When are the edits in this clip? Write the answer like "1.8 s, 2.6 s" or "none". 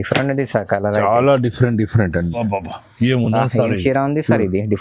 2.4 s